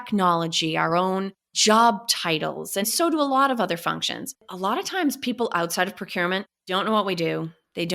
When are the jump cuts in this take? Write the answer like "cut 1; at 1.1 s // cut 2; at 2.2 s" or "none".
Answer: cut 1; at 4.4 s